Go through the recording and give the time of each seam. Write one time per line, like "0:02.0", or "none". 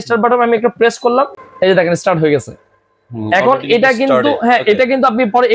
0:01.4